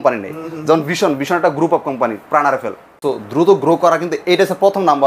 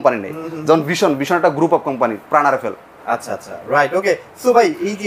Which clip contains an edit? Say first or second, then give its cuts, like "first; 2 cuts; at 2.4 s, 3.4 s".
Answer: first; 1 cut; at 2.8 s